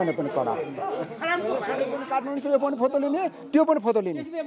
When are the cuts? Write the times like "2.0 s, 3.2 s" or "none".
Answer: 1.7 s